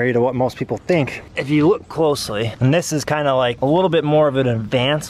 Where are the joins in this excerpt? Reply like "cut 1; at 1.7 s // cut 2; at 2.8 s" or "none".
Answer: cut 1; at 1.3 s